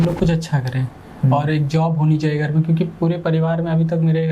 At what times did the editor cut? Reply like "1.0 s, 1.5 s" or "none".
none